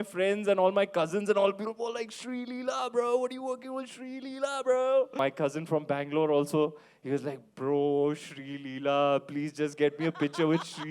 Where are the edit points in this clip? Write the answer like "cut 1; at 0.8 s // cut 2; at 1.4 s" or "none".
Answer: cut 1; at 5.1 s